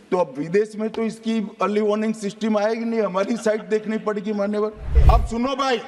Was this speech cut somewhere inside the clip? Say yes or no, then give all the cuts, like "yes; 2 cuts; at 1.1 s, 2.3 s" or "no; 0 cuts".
yes; 1 cut; at 4.9 s